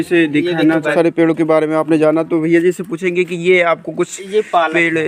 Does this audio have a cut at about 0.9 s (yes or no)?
yes